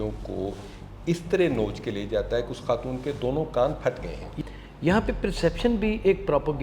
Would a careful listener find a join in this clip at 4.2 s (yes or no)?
yes